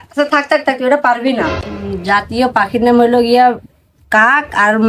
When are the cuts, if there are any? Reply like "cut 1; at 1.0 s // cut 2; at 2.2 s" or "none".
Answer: cut 1; at 1.5 s